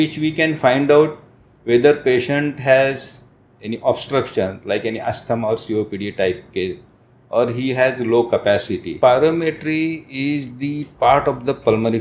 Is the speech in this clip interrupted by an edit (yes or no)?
yes